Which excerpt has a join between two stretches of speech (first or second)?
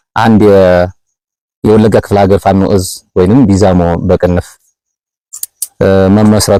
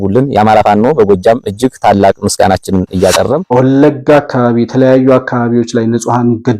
second